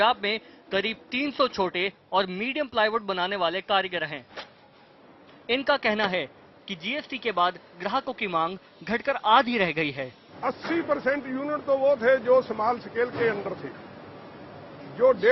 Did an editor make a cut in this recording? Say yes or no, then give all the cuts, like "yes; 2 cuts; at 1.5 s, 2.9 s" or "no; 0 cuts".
no; 0 cuts